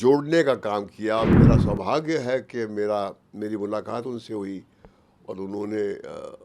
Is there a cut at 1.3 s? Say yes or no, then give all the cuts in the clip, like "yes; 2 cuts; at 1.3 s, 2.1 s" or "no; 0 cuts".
yes; 1 cut; at 1.3 s